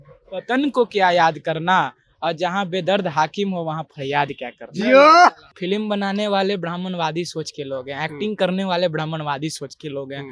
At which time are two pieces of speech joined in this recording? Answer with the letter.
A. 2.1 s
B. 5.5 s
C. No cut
B